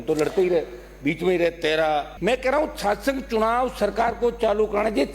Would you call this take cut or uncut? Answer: cut